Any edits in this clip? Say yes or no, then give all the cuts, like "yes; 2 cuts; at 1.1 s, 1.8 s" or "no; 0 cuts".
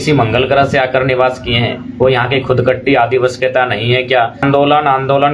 yes; 1 cut; at 4.4 s